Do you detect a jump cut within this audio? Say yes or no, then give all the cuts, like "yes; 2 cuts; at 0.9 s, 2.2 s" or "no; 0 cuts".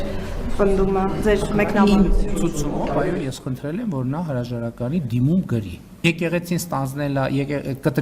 yes; 1 cut; at 6.0 s